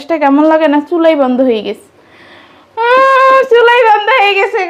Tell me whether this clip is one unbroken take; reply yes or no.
yes